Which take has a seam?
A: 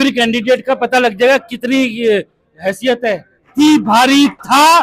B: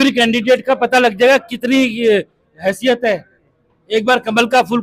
A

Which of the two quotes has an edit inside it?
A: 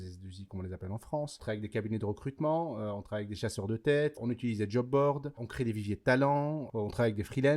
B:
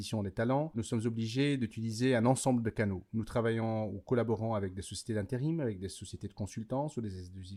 A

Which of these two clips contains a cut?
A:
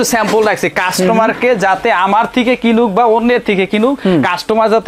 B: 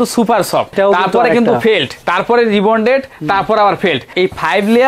B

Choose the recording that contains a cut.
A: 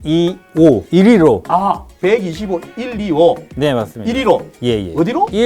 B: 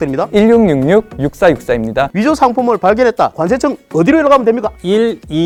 A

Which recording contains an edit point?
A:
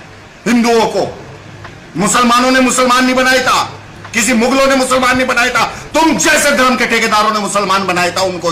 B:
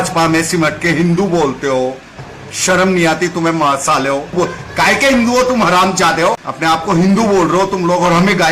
B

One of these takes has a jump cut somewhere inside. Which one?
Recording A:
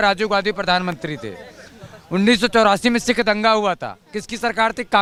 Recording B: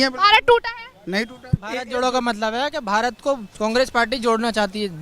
B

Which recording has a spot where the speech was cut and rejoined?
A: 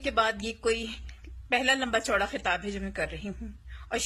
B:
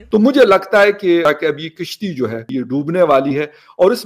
B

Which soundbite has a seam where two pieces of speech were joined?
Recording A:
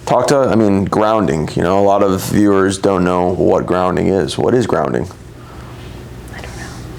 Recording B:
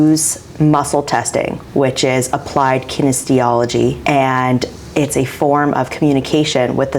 B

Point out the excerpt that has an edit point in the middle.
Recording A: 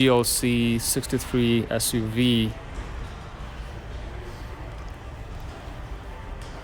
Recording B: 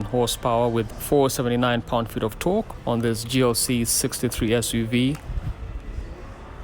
B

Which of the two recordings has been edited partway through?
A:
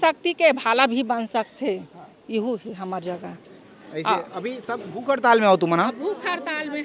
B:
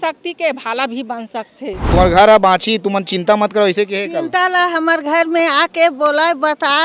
B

